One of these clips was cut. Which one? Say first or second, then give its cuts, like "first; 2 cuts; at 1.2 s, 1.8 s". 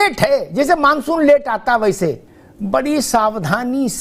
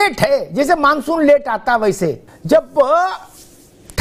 second; 1 cut; at 2.3 s